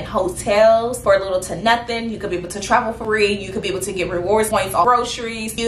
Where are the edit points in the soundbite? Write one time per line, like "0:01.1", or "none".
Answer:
0:03.0
0:04.6